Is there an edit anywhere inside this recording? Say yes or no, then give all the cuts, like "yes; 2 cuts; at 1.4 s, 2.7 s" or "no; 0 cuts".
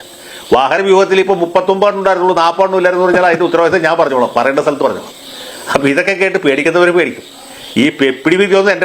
no; 0 cuts